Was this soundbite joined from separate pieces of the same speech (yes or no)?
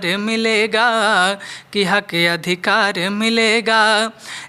no